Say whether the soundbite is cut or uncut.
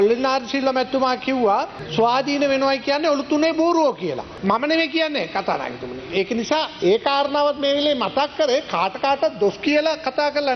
uncut